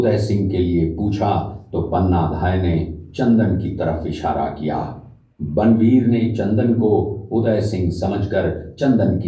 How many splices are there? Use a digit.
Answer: 0